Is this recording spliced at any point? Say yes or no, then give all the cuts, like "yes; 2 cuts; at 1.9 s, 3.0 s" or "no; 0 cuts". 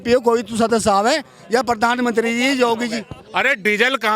yes; 1 cut; at 3.2 s